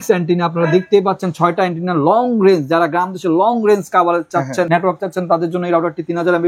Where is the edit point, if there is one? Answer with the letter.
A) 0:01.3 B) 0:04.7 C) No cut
B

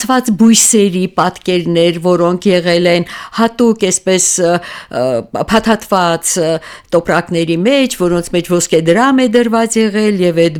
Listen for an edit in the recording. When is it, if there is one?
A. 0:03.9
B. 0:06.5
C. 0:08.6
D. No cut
D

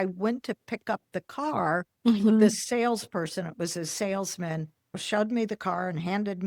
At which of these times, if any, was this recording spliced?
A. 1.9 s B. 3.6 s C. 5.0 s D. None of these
C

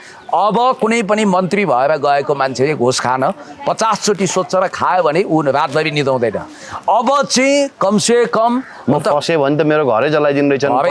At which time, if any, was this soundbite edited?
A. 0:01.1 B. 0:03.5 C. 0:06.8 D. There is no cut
D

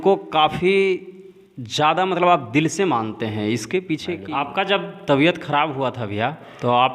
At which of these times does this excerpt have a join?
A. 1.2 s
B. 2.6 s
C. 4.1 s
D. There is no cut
C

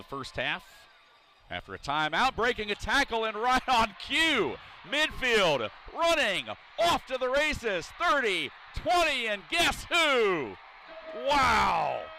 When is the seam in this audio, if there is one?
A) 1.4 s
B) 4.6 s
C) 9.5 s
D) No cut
D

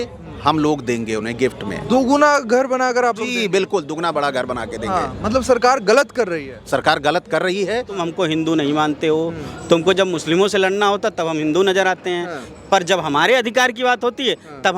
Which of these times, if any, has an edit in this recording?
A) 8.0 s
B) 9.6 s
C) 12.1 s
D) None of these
A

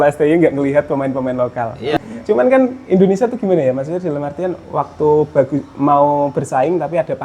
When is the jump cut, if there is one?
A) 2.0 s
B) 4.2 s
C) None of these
A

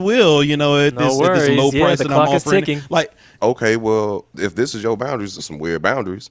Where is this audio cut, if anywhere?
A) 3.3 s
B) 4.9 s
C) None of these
A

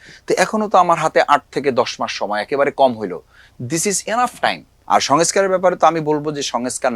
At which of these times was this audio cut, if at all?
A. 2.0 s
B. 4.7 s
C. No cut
B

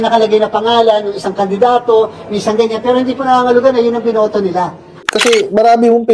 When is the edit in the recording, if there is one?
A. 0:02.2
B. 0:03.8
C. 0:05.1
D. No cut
C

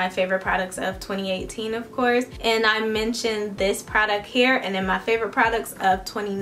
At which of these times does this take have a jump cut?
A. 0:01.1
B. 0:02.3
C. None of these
B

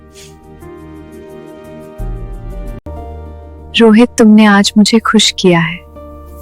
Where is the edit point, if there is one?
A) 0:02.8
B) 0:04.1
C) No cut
A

